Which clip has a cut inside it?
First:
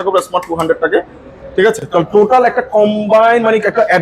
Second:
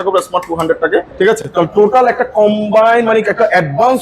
second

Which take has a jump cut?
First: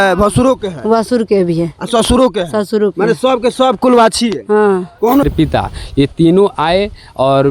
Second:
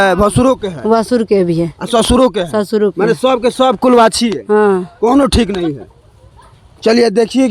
first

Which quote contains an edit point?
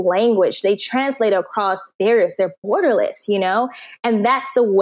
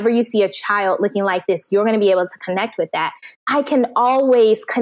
second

